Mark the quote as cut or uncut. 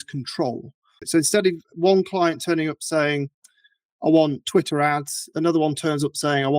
cut